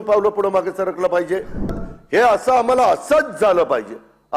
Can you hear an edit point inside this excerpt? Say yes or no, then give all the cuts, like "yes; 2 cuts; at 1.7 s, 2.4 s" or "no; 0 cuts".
yes; 1 cut; at 1.8 s